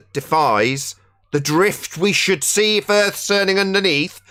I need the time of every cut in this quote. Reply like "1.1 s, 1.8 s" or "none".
none